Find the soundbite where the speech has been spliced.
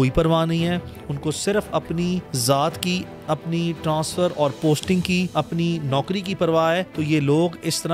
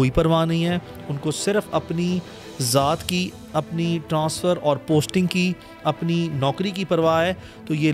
first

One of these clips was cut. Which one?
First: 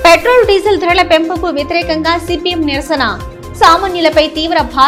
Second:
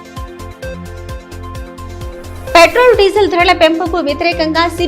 second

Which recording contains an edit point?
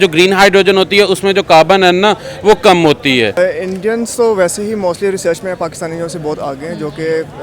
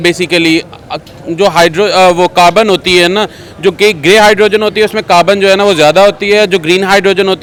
first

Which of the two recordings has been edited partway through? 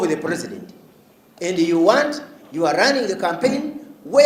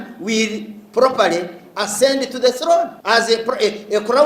second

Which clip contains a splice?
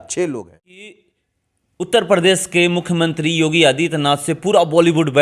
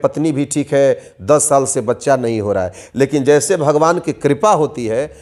first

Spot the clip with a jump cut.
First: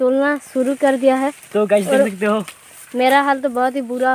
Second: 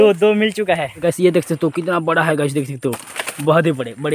second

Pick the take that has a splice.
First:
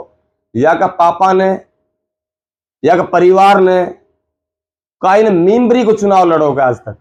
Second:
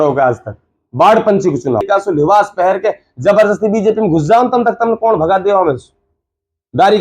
second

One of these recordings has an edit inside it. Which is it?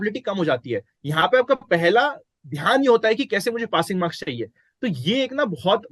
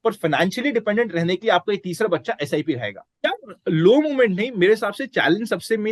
second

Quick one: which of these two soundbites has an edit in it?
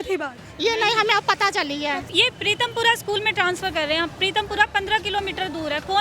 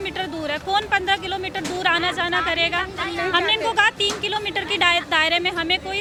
first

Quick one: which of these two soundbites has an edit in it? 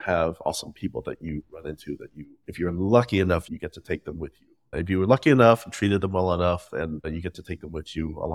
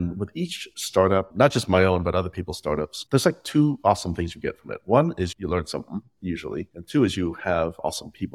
second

